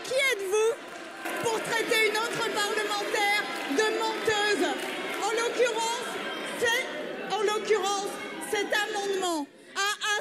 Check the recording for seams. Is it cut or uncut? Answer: uncut